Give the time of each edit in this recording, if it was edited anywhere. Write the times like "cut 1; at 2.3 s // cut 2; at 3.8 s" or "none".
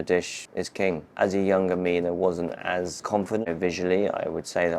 cut 1; at 0.9 s // cut 2; at 3.5 s